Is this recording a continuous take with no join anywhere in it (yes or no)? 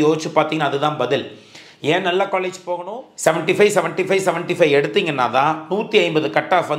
no